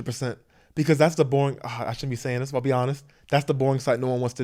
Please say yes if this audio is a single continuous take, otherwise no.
yes